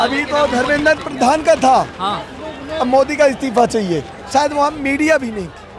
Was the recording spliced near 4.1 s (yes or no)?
yes